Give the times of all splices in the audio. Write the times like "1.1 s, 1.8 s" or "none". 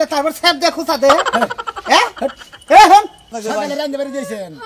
3.4 s

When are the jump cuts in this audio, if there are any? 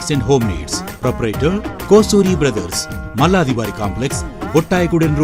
none

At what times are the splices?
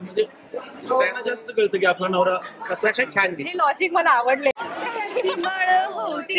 4.6 s

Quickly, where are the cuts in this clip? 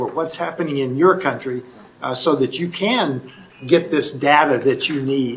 none

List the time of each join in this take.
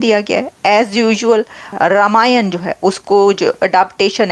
1.6 s

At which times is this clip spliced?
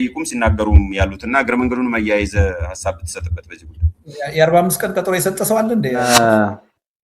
6.0 s

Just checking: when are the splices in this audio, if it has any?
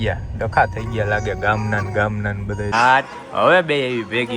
2.7 s

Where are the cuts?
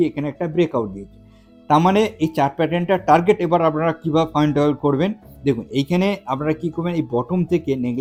none

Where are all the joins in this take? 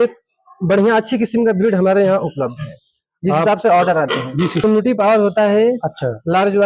4.6 s

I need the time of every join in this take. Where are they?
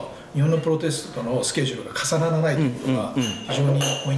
none

